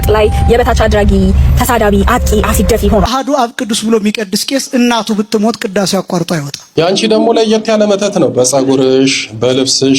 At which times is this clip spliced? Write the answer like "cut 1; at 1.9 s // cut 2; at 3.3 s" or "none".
cut 1; at 3.1 s // cut 2; at 6.7 s